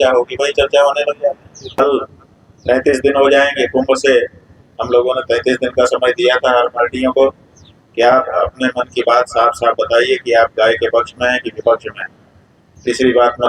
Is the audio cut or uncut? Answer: cut